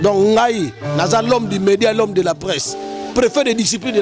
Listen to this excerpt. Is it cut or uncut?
uncut